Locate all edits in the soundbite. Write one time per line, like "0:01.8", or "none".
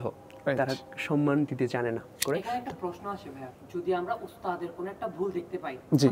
0:02.2
0:03.5